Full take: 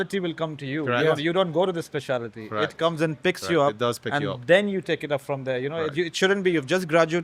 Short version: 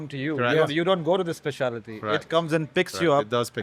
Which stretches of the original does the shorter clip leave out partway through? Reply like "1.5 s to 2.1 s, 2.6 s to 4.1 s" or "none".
none